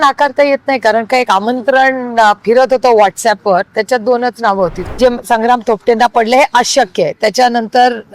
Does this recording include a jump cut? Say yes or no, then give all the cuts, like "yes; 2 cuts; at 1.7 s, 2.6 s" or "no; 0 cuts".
yes; 1 cut; at 4.8 s